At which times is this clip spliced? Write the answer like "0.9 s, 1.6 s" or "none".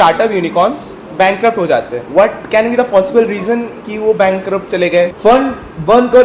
2.0 s, 5.1 s